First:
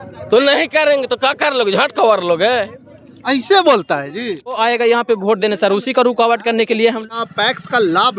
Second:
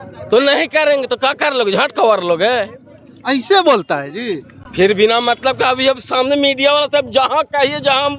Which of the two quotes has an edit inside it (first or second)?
first